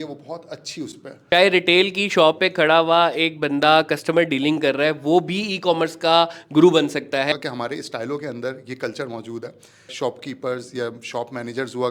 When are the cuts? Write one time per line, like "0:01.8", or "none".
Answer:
0:01.1
0:07.3
0:09.9